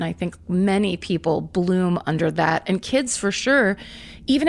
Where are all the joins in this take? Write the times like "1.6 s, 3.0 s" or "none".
none